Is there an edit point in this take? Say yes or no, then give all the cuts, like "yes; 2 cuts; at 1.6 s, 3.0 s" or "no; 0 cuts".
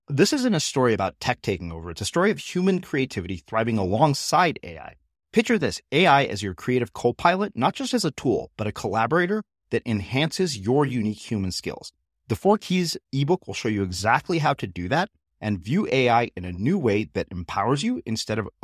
no; 0 cuts